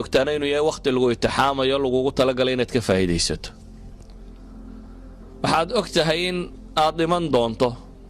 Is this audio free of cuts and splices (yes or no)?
no